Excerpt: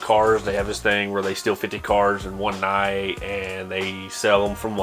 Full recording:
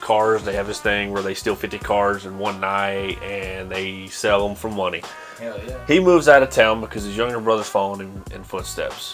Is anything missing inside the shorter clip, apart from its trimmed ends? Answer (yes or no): no